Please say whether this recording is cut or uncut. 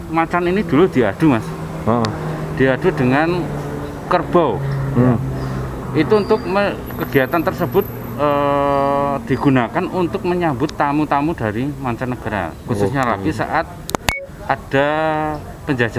uncut